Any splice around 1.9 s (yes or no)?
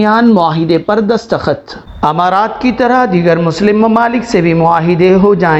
yes